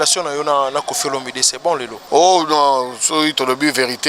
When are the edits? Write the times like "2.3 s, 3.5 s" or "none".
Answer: 2.0 s

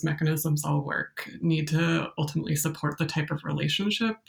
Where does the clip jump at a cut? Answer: none

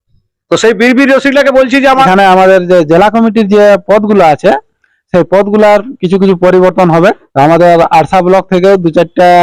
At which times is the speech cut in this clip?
2.1 s, 7.2 s

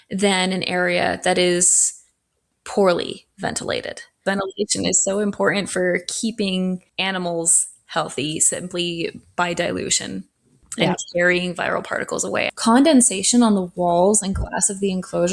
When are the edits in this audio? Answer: 4.2 s, 6.9 s, 12.5 s

